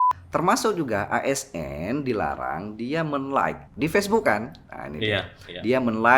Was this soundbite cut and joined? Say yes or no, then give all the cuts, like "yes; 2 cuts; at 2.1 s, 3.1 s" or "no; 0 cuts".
yes; 1 cut; at 3.7 s